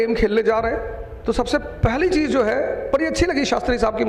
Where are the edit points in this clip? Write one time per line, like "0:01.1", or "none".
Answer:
none